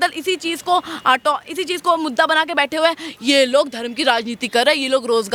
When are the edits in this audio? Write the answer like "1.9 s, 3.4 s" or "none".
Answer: none